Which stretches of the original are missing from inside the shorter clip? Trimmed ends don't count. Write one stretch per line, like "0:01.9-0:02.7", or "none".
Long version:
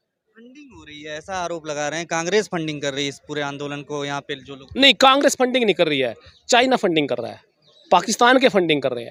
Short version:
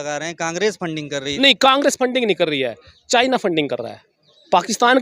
0:03.0-0:04.7